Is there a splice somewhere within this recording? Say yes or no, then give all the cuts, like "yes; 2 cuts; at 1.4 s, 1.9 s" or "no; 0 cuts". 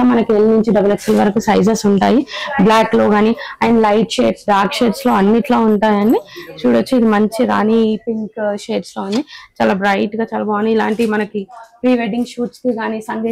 no; 0 cuts